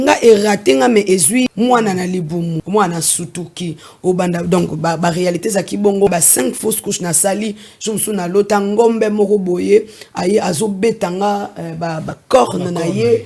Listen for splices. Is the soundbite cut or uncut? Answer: cut